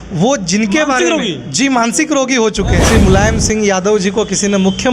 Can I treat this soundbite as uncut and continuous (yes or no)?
no